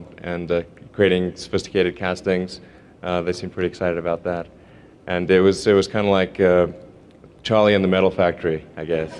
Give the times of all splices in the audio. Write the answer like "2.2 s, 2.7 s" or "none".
5.0 s